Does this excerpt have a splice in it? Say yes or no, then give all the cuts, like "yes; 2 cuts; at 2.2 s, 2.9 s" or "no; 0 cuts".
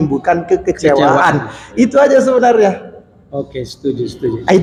no; 0 cuts